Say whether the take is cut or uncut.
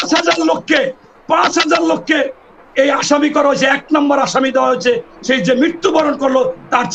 uncut